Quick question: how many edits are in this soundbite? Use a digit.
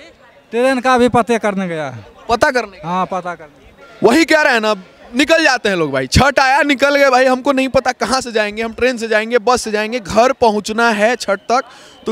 0